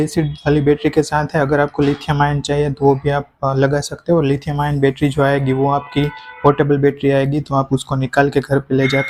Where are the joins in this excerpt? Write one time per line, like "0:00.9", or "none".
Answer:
none